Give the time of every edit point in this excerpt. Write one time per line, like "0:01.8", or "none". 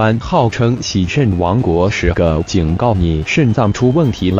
0:01.5